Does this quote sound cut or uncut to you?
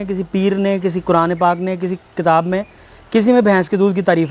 uncut